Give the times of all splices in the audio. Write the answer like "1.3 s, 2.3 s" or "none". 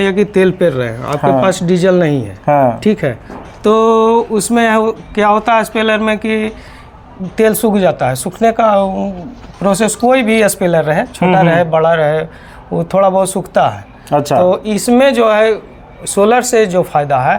none